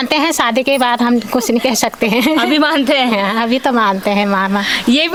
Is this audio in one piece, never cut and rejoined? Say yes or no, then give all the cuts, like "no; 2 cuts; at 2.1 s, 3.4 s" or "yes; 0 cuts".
yes; 0 cuts